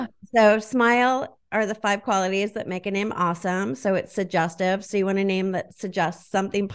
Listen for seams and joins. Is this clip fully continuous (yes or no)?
yes